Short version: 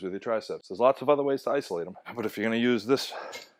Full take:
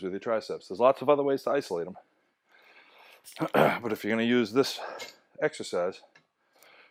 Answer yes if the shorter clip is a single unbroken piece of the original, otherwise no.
no